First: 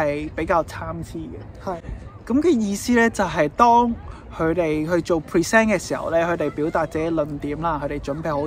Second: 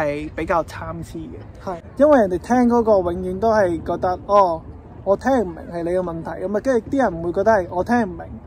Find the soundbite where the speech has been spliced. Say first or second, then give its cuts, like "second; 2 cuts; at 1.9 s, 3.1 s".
second; 1 cut; at 1.8 s